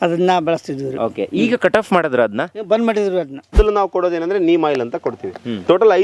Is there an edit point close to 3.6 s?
yes; 1 cut; at 3.6 s

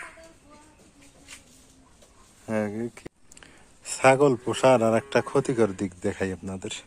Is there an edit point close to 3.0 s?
yes; 1 cut; at 3.0 s

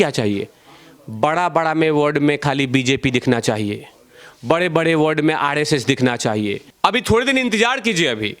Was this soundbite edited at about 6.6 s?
yes; 1 cut; at 6.6 s

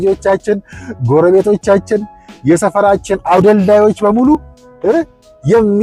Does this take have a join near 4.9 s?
no; 0 cuts

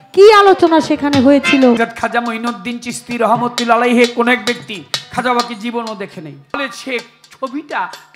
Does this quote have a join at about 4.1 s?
no; 2 cuts; at 1.8 s, 6.6 s

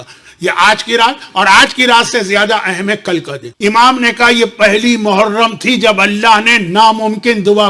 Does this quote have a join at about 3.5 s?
yes; 1 cut; at 3.5 s

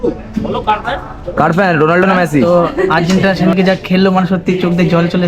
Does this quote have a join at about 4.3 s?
no; 1 cut; at 2.4 s

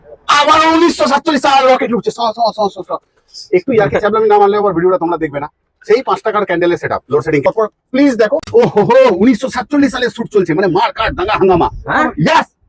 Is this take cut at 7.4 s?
yes; 1 cut; at 7.4 s

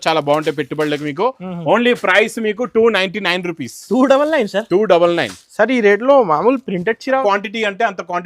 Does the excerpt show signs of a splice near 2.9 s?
no; 1 cut; at 7.2 s

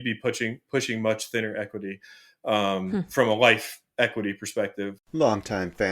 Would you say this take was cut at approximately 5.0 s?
yes; 1 cut; at 5.0 s

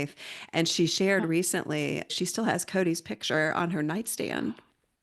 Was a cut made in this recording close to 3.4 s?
no; 1 cut; at 2.1 s

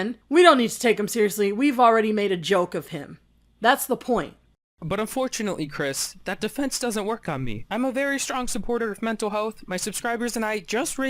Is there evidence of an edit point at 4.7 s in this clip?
yes; 1 cut; at 4.7 s

